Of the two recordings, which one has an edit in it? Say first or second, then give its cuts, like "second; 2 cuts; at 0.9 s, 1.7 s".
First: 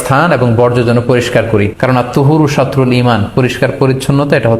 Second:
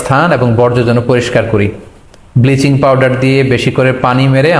first; 1 cut; at 1.7 s